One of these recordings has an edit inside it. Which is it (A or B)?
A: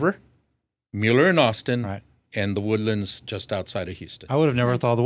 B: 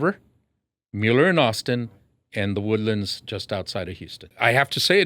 B